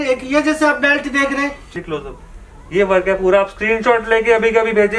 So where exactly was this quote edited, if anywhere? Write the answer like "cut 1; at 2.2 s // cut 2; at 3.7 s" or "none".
cut 1; at 1.6 s